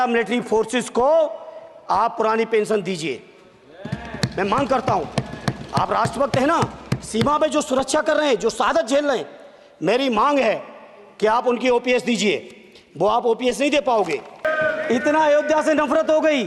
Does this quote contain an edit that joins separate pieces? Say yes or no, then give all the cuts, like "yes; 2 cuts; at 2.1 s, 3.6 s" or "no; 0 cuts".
yes; 1 cut; at 14.4 s